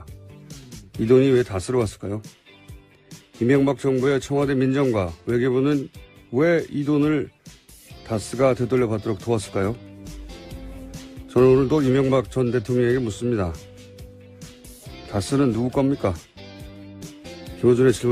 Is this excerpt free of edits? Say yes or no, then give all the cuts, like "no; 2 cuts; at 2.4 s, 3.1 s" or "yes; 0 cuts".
no; 1 cut; at 8.3 s